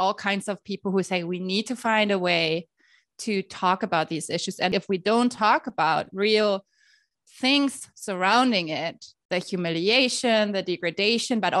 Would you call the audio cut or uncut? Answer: cut